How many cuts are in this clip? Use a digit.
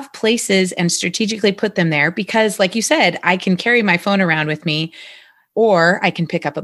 1